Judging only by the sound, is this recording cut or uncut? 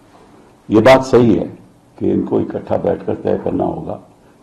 uncut